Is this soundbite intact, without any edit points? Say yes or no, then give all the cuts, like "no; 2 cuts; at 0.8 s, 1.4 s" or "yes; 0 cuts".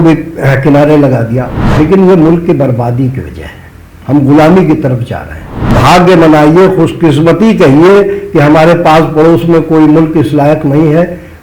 no; 2 cuts; at 1.6 s, 5.8 s